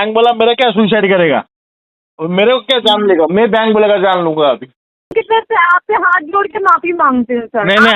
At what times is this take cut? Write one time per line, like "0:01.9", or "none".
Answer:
0:05.1